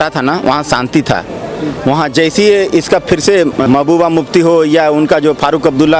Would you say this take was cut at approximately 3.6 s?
yes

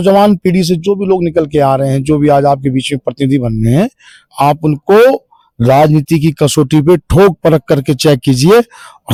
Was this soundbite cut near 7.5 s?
no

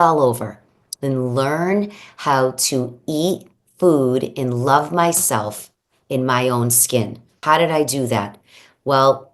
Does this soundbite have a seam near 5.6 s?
no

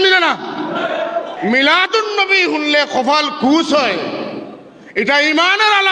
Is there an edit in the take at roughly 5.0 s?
no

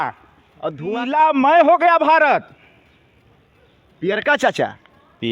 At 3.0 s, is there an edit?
no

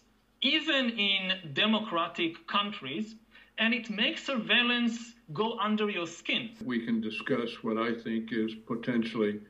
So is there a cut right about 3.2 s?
no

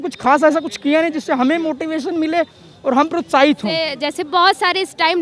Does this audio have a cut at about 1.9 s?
no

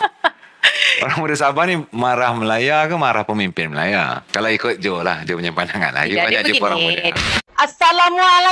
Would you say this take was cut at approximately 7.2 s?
yes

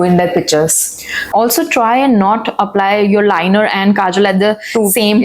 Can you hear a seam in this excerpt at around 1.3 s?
yes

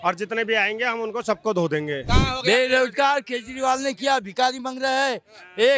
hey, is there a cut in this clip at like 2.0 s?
yes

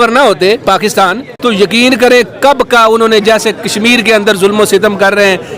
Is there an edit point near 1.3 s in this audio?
yes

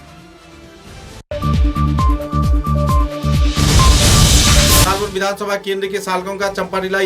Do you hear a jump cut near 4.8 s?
yes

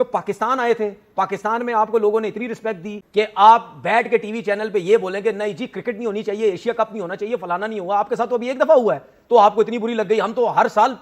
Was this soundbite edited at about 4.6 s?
no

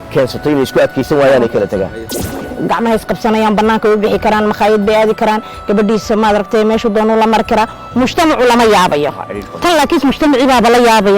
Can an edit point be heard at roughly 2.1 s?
yes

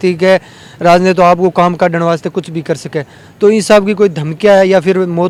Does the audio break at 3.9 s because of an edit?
no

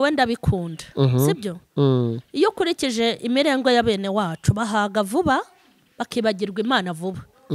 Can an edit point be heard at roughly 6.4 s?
no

